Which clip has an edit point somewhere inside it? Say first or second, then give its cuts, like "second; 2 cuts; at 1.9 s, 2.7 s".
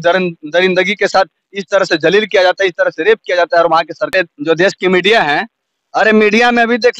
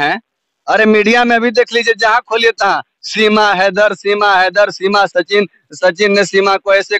first; 1 cut; at 4.1 s